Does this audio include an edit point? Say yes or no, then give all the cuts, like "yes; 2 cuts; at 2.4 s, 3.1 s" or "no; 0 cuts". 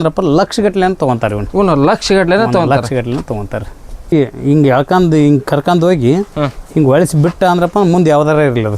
yes; 1 cut; at 4.1 s